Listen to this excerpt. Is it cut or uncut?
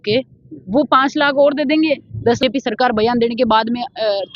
cut